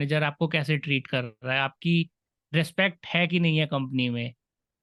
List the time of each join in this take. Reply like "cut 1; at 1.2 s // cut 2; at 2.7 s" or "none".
none